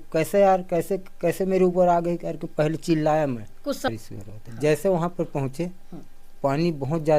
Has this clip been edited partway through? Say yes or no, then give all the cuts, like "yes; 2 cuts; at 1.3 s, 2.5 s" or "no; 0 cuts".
yes; 1 cut; at 3.9 s